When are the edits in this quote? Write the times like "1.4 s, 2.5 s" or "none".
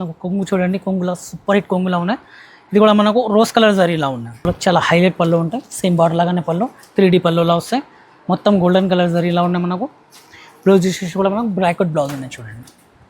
4.5 s